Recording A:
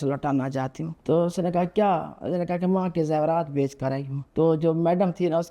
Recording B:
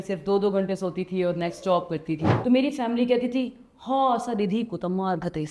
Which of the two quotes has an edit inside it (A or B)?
B